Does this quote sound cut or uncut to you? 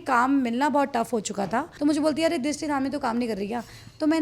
cut